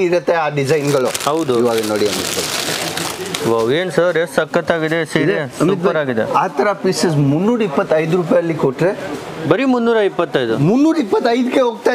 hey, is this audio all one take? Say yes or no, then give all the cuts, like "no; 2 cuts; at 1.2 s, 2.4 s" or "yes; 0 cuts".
yes; 0 cuts